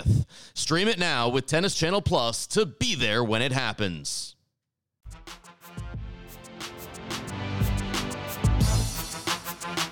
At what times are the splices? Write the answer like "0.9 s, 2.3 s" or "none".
none